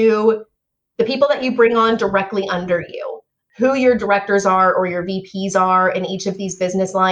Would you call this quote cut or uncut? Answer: uncut